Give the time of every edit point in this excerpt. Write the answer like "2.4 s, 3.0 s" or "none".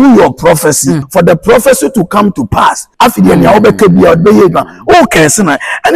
1.0 s, 2.8 s